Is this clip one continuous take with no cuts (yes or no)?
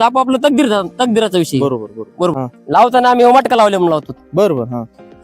no